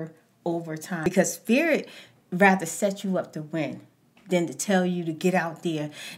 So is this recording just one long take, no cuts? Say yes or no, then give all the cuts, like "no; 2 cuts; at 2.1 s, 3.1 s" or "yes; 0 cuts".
no; 1 cut; at 1.0 s